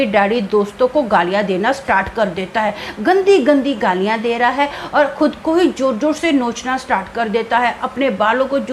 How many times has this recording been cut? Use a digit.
0